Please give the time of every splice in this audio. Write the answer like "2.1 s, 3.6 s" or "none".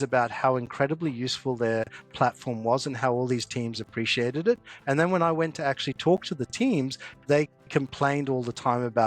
none

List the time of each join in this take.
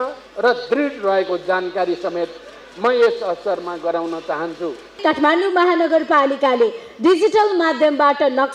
5.0 s

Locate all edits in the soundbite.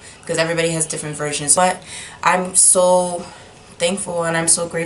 1.5 s

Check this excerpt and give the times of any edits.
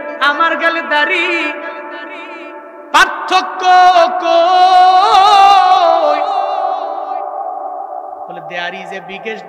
none

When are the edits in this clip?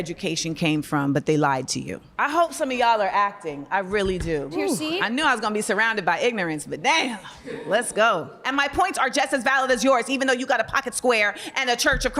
none

